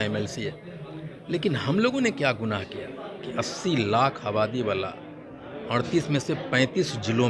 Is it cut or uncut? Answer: uncut